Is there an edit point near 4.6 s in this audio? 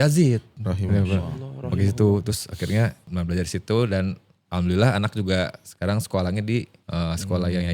no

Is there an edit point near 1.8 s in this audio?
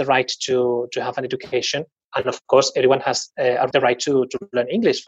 no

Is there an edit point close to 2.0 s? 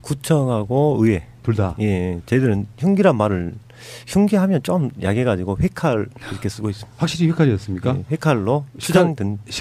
yes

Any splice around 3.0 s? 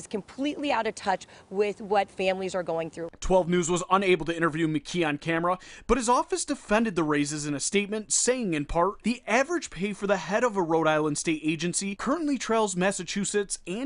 yes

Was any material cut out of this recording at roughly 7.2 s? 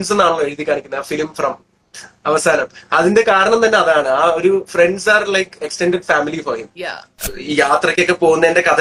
yes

